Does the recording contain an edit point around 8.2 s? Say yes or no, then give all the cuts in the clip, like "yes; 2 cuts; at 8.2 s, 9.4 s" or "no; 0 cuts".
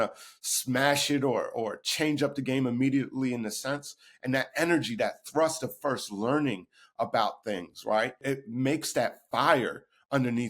yes; 1 cut; at 8.2 s